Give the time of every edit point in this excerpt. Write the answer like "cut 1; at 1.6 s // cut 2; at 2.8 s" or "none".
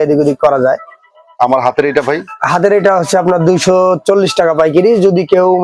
none